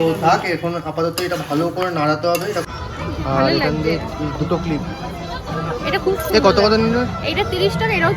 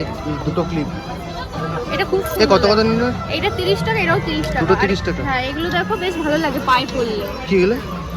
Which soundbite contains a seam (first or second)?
first